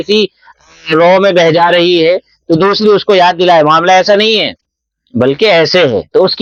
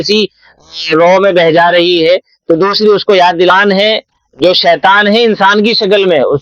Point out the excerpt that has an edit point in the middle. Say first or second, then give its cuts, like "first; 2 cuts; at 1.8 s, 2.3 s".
second; 1 cut; at 3.5 s